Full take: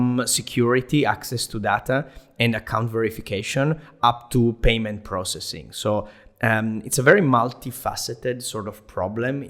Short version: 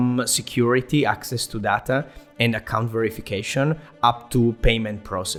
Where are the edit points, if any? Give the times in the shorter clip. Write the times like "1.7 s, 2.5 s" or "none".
none